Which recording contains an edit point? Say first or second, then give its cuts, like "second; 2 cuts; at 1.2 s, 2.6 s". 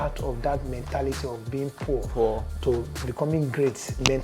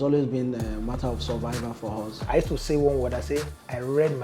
second; 1 cut; at 2.2 s